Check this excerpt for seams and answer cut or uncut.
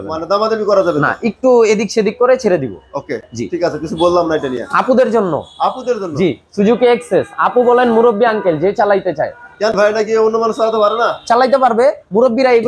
uncut